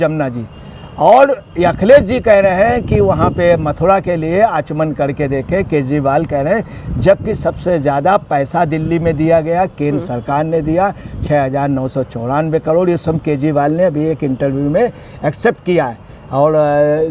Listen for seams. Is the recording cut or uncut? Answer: uncut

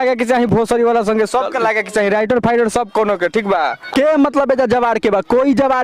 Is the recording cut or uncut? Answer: cut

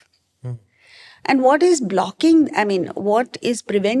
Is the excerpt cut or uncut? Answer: uncut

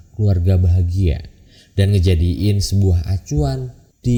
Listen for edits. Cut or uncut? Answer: uncut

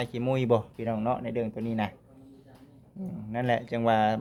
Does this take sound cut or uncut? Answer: uncut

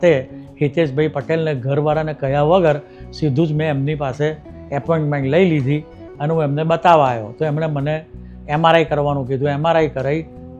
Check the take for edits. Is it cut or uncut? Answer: uncut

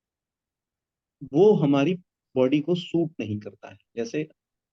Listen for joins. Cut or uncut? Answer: uncut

